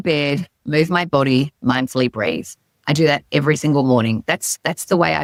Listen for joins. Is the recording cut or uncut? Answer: uncut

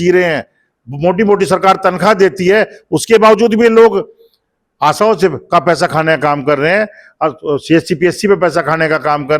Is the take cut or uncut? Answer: uncut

